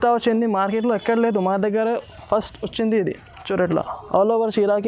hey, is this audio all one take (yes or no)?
yes